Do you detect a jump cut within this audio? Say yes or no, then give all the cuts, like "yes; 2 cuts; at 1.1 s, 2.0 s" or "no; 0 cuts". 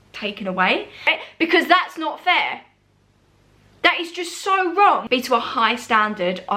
yes; 2 cuts; at 1.2 s, 5.0 s